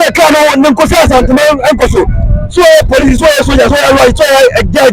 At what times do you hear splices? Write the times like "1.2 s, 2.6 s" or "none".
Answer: none

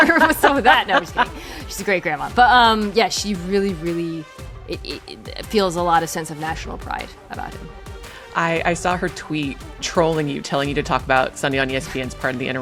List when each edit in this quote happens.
none

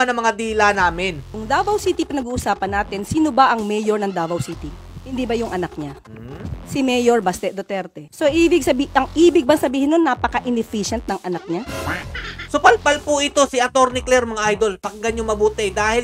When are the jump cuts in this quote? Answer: 1.2 s, 12.4 s

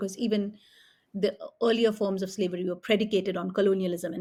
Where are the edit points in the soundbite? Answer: none

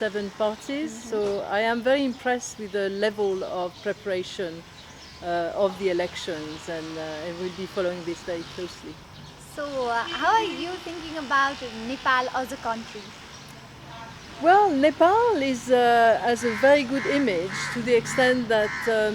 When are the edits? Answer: none

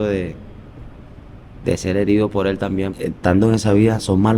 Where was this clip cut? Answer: 2.9 s

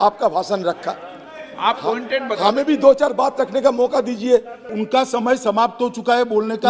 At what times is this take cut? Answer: 4.7 s

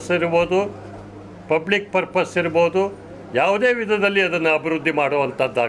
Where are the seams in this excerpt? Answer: none

